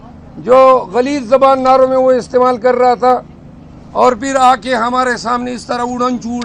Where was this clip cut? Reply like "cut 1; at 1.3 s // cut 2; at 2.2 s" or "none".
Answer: none